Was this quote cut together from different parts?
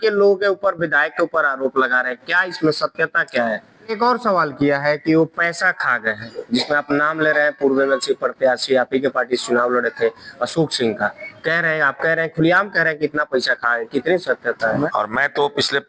yes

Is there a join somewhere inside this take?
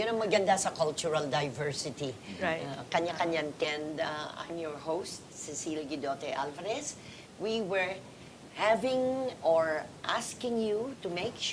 no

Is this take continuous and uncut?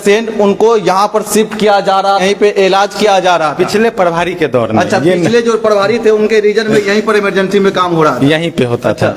yes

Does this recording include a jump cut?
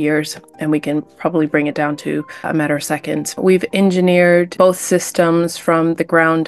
yes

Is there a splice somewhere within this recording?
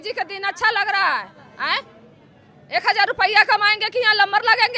no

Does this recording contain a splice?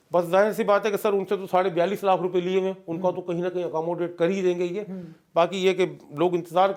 no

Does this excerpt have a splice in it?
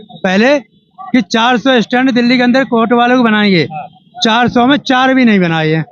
no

